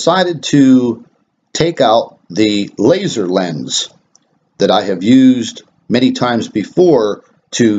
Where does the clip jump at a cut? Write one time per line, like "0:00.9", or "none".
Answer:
0:06.4